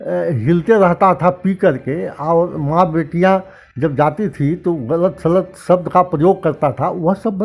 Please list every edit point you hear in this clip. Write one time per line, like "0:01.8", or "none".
none